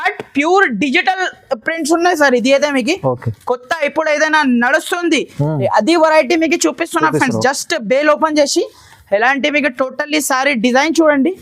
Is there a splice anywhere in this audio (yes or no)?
no